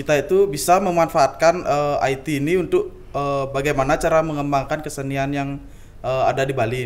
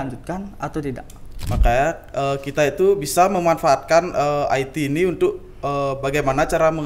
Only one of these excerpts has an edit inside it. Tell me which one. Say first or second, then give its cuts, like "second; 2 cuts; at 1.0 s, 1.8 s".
second; 1 cut; at 1.4 s